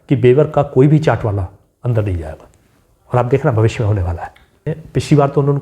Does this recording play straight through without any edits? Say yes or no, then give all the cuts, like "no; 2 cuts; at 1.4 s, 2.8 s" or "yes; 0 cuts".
no; 1 cut; at 4.7 s